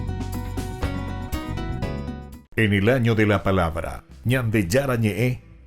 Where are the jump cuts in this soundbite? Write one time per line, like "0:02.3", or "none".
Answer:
0:02.4